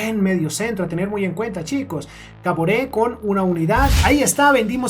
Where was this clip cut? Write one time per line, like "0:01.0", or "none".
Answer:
0:04.0